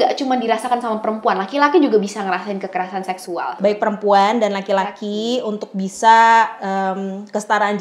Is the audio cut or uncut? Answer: cut